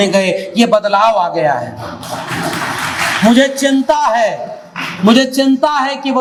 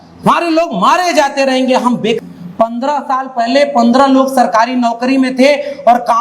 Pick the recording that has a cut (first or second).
second